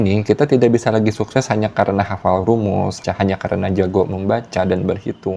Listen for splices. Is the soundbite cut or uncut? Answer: uncut